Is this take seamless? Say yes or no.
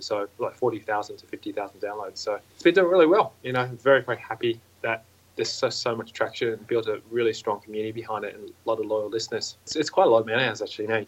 no